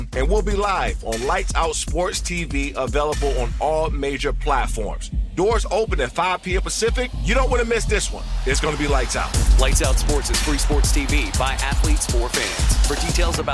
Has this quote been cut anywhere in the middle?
no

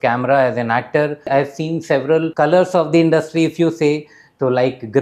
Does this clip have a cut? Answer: yes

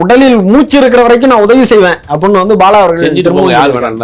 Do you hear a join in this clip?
no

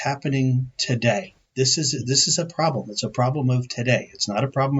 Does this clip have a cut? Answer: yes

